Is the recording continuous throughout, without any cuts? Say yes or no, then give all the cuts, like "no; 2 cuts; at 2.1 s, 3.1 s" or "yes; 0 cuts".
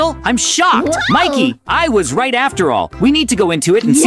yes; 0 cuts